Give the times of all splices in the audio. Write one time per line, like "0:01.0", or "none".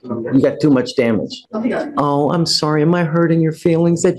0:01.4